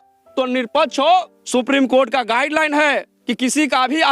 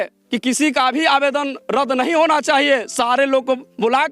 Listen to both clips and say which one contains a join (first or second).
first